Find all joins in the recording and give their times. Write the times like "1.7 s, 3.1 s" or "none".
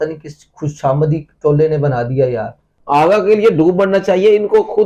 2.7 s